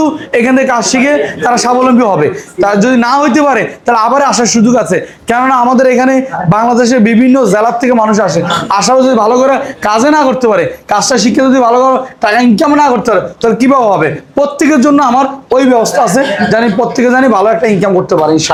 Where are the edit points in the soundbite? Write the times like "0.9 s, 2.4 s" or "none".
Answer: none

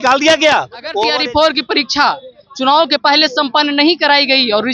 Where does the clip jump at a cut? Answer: 1.1 s

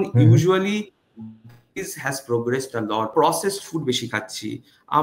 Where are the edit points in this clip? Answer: 3.1 s

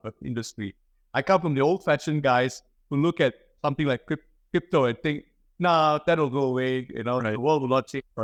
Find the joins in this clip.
none

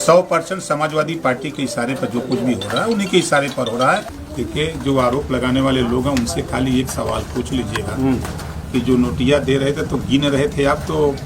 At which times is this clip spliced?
4.2 s

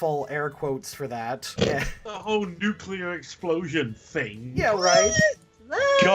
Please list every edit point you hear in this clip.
1.5 s

